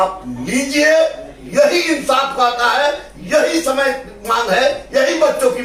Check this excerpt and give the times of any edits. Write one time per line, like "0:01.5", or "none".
none